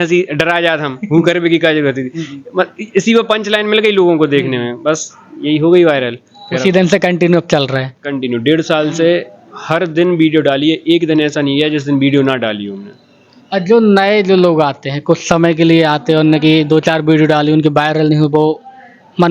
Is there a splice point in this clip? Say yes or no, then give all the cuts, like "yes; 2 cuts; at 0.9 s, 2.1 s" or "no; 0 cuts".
no; 0 cuts